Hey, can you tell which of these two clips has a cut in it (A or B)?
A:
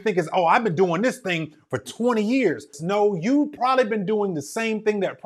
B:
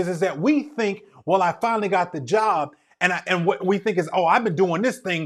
A